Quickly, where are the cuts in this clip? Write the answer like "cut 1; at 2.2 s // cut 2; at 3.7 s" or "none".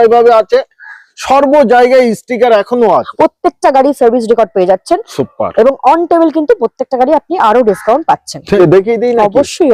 cut 1; at 3.1 s // cut 2; at 8.6 s